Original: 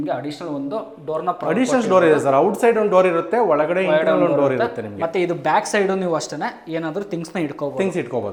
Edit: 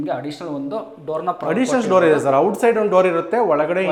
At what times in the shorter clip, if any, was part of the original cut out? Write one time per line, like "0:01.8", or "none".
none